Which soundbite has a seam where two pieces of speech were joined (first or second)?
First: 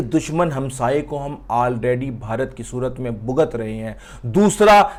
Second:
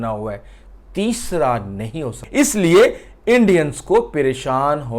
second